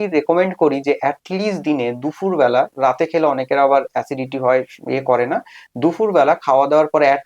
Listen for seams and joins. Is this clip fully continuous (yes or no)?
yes